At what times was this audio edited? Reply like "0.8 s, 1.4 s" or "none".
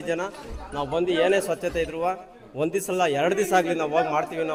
none